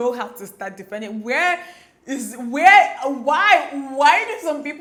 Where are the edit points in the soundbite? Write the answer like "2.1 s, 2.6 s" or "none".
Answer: none